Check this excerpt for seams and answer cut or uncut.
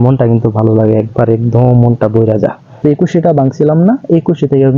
cut